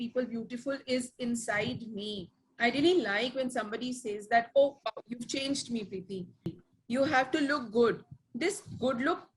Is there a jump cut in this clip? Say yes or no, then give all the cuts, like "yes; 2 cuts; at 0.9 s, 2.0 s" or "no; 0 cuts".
yes; 1 cut; at 6.5 s